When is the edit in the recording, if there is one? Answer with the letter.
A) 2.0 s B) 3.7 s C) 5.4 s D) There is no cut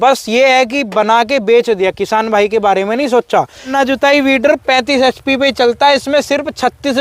B